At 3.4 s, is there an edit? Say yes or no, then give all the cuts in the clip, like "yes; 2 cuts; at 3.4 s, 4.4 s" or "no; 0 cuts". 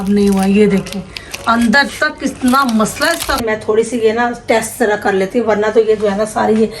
yes; 1 cut; at 3.4 s